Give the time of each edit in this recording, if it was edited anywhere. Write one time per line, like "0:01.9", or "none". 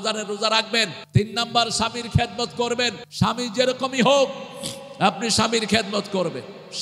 0:01.0
0:03.0